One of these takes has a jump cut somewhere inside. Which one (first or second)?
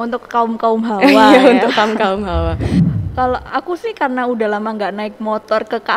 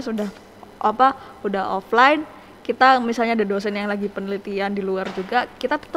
first